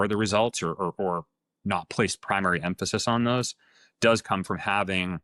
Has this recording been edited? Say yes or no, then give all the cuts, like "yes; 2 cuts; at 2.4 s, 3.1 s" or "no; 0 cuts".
no; 0 cuts